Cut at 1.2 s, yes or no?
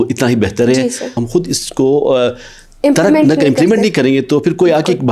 yes